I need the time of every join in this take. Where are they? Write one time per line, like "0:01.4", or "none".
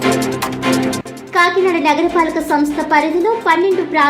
0:00.9